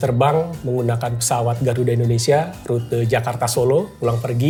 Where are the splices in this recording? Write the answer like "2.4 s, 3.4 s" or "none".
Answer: none

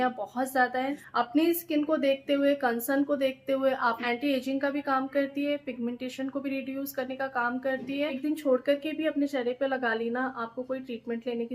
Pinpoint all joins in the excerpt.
1.0 s, 4.0 s, 8.2 s

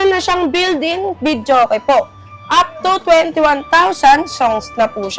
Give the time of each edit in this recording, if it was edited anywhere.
none

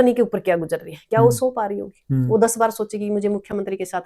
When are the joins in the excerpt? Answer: none

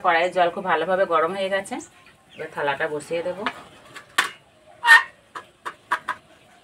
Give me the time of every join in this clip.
none

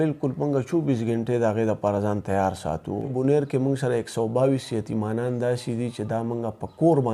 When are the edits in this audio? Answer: 3.1 s

